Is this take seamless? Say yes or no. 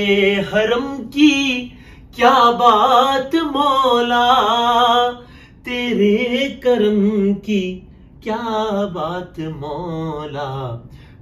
yes